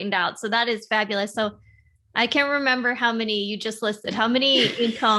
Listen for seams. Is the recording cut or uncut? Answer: uncut